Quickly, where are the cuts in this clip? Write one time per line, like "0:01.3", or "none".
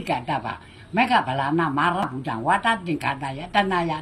0:02.0